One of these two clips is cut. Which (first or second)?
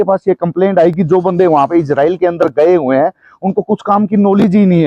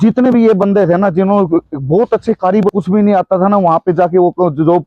second